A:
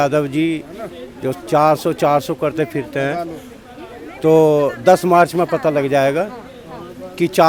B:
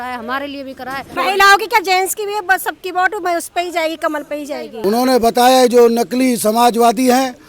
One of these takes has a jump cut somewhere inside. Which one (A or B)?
B